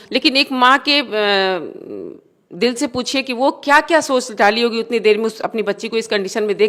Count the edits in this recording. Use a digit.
0